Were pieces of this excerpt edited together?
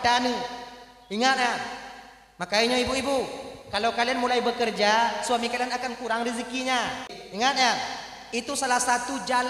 yes; 1 cut; at 7.2 s

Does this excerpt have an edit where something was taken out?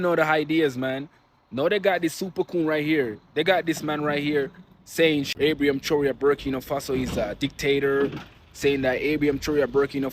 yes; 1 cut; at 5.3 s

